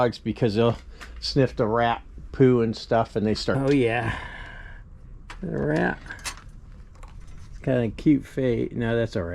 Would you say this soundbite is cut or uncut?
cut